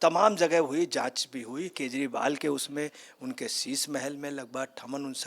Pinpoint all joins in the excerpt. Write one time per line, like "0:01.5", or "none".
0:01.8